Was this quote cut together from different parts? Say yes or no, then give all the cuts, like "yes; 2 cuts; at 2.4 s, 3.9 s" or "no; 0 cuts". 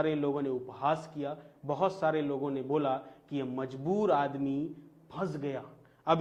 no; 0 cuts